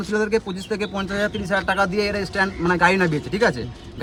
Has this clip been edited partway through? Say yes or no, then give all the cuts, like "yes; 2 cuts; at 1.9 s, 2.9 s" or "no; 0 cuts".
no; 0 cuts